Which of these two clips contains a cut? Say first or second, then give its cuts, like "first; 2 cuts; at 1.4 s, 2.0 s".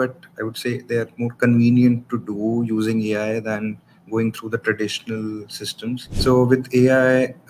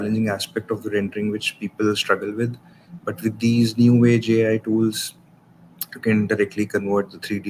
first; 1 cut; at 6.1 s